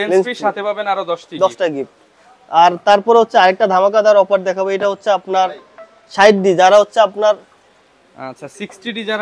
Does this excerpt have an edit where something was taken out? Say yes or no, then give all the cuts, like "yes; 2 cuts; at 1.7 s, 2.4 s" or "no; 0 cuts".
no; 0 cuts